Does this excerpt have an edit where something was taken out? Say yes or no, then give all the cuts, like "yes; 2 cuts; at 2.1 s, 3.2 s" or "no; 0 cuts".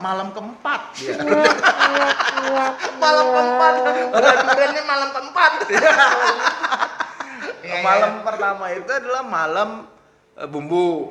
no; 0 cuts